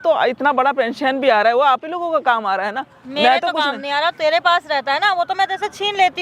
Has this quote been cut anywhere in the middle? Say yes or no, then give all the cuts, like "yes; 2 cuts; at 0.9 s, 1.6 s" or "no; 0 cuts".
no; 0 cuts